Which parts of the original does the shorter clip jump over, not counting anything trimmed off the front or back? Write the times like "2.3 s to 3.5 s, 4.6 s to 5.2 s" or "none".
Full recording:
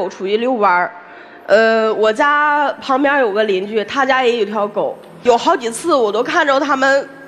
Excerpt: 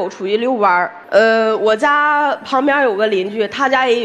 1.0 s to 1.3 s